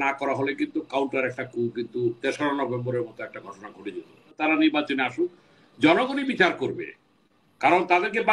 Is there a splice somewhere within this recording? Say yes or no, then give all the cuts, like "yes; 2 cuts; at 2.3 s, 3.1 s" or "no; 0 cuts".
yes; 1 cut; at 4.4 s